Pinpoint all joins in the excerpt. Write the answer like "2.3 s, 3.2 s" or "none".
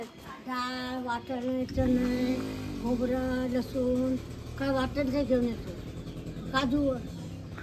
none